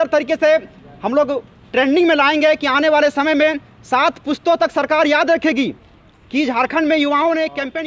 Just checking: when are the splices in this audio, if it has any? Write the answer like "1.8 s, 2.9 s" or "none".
none